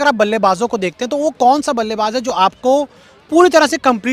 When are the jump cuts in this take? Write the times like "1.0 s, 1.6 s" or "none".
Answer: none